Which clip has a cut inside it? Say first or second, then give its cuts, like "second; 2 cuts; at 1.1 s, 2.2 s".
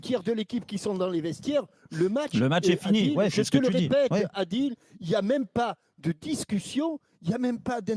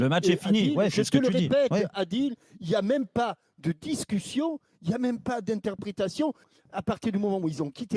second; 1 cut; at 6.5 s